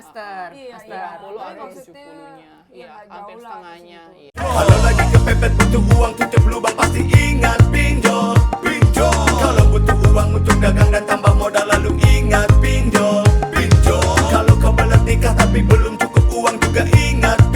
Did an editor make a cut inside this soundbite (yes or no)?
yes